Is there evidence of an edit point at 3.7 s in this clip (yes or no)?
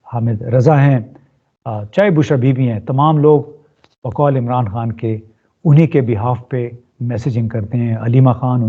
no